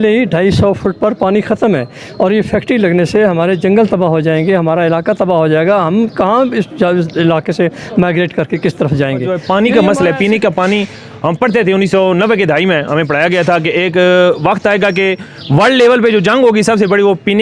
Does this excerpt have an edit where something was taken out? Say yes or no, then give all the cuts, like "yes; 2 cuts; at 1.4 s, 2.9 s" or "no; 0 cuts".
yes; 1 cut; at 9.4 s